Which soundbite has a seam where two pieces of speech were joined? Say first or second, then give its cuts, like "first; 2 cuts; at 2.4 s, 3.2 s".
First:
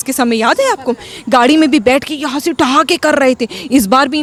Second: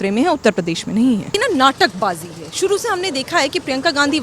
second; 1 cut; at 1.3 s